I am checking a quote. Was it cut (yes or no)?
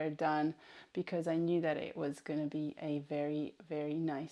no